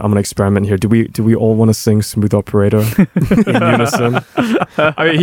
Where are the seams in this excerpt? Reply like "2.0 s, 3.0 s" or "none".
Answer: none

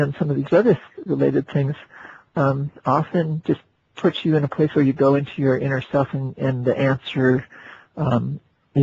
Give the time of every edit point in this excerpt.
none

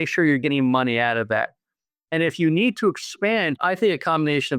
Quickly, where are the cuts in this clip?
3.6 s

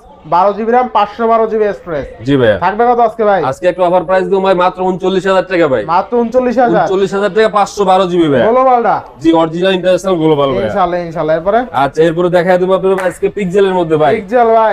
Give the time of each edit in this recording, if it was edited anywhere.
none

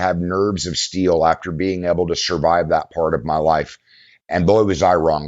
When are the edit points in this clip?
none

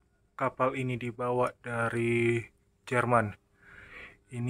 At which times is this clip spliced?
none

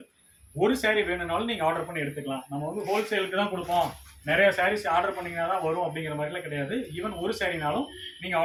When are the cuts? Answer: none

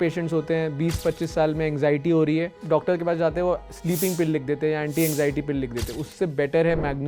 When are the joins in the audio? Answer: 2.6 s

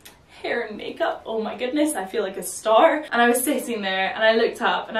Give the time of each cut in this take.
3.0 s

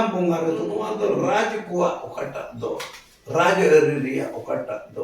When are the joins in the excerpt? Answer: 1.3 s

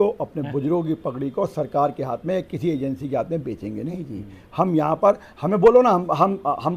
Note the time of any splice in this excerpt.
none

